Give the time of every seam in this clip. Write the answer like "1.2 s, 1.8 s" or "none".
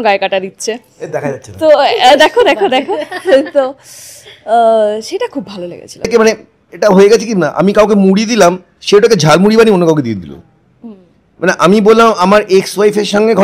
6.1 s